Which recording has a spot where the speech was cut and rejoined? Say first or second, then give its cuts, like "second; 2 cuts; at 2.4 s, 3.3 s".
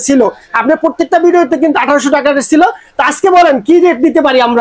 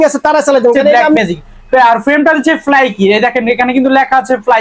second; 1 cut; at 1.2 s